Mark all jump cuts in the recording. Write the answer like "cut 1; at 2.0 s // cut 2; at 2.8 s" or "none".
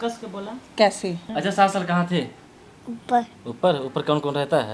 cut 1; at 1.2 s